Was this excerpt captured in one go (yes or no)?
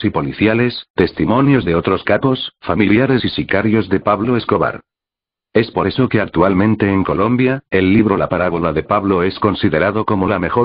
no